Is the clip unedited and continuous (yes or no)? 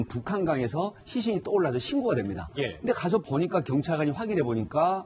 yes